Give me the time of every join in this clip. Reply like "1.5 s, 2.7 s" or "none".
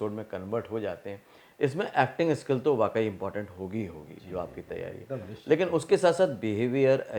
none